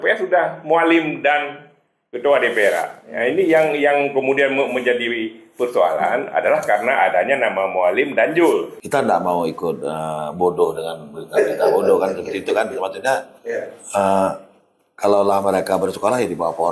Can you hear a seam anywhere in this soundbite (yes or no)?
yes